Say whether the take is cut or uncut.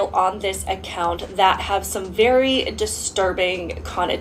uncut